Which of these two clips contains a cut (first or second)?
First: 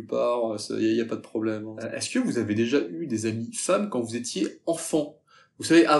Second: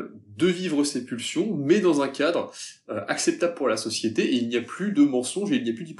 first